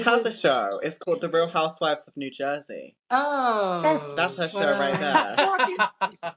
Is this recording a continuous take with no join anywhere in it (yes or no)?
yes